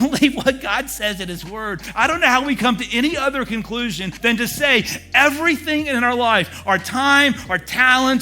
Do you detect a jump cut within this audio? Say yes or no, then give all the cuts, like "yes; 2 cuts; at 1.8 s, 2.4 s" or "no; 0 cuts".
yes; 2 cuts; at 1.8 s, 4.1 s